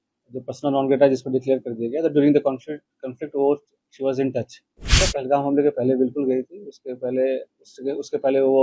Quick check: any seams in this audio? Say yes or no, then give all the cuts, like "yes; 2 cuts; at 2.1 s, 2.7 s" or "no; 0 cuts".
yes; 1 cut; at 5.0 s